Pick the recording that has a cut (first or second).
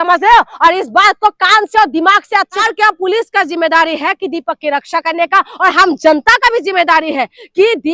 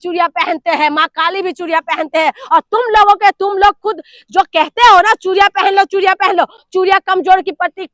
first